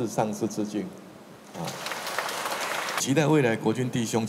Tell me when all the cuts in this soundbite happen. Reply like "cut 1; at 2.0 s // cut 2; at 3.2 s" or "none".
cut 1; at 3.0 s